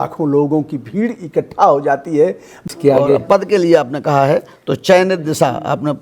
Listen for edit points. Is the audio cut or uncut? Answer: cut